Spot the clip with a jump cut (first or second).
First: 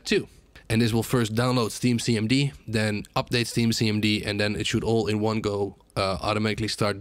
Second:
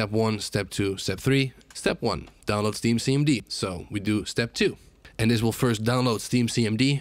second